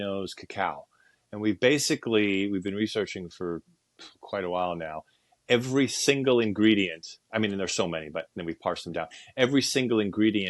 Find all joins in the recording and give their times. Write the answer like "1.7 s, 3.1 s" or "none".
none